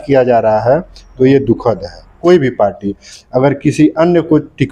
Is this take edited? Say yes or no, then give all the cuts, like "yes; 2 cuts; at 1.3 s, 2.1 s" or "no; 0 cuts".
yes; 1 cut; at 2.2 s